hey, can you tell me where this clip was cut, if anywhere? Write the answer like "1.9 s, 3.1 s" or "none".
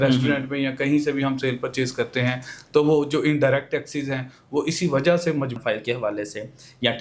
5.6 s